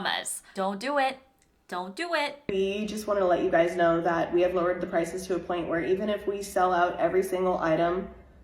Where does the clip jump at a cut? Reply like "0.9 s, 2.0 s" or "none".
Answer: 2.4 s

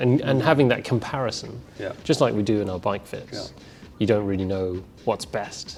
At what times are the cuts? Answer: none

